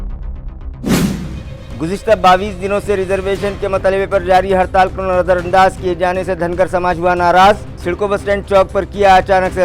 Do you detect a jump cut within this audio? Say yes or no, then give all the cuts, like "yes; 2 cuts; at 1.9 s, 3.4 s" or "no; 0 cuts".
yes; 1 cut; at 1.4 s